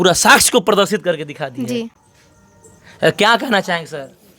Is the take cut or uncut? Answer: uncut